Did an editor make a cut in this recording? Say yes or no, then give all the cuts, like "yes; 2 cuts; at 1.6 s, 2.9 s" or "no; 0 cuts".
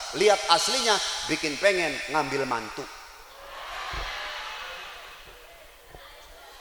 no; 0 cuts